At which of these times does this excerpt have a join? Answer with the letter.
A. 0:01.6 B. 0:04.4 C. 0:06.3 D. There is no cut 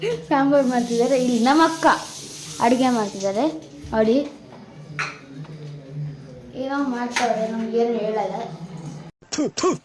D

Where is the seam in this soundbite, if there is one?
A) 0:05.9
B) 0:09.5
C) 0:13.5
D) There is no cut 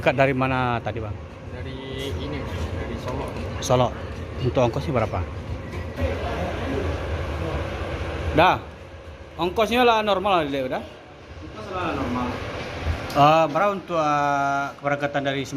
A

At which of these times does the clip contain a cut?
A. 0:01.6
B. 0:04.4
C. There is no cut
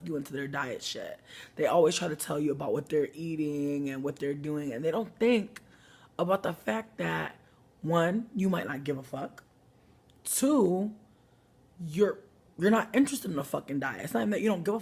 A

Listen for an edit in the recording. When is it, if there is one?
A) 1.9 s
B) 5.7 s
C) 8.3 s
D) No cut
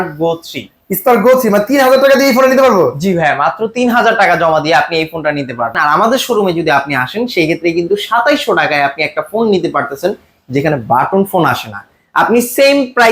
B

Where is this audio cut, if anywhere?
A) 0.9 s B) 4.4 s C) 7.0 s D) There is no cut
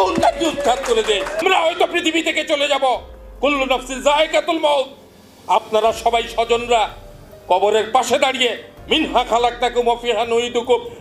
A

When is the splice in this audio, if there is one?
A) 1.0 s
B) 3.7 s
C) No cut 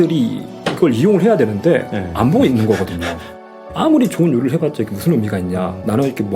B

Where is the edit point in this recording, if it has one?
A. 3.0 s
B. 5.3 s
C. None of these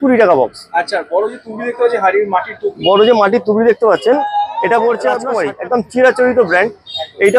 B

